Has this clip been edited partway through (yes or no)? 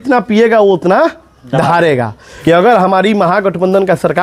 yes